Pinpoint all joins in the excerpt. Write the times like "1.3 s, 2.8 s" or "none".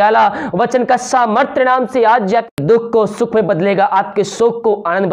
2.5 s

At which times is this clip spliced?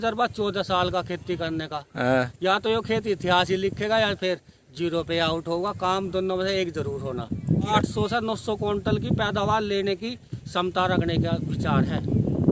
7.7 s

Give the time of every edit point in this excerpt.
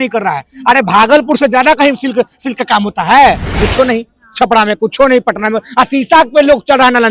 3.6 s

